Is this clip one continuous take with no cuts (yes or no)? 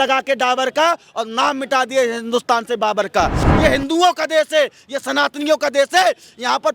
no